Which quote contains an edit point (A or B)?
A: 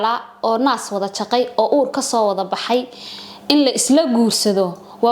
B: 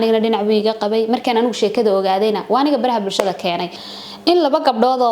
B